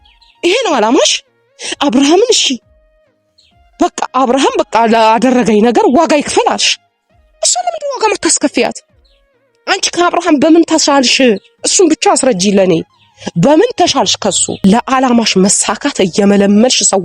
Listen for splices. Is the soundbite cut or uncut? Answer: cut